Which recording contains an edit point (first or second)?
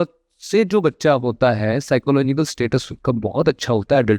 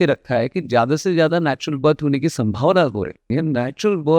second